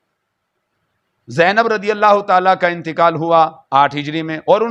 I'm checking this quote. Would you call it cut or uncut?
uncut